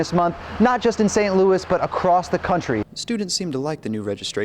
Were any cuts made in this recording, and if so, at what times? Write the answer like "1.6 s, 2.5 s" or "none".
2.8 s